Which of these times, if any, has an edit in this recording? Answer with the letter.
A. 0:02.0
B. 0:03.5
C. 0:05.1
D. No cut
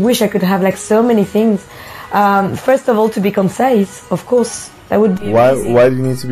C